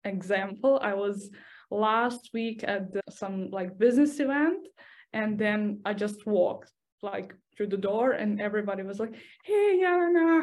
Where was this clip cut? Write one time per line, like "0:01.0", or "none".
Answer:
0:03.0